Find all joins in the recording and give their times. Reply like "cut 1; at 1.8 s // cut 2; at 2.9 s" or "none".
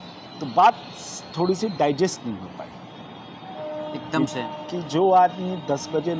none